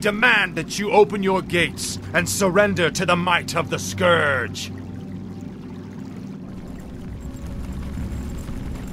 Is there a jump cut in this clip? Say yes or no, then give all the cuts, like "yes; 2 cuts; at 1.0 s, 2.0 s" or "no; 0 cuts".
yes; 1 cut; at 3.7 s